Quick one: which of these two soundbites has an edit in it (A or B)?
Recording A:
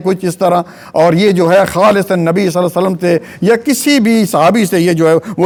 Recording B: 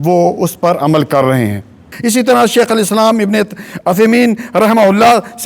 B